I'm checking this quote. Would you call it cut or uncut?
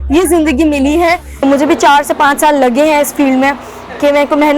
cut